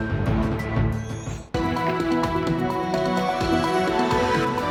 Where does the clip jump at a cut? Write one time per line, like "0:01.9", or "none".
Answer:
none

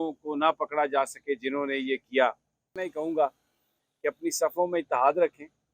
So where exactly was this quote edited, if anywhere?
0:02.8

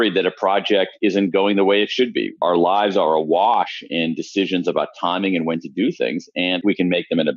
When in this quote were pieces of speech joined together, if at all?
0:02.3
0:06.6

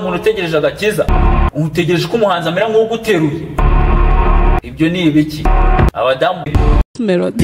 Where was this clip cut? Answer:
0:06.4

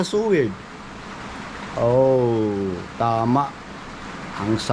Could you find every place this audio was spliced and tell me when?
none

